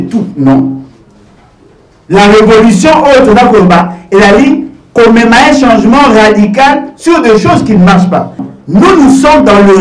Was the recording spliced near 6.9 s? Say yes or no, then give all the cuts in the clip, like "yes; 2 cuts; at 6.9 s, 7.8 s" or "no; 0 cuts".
no; 1 cut; at 8.5 s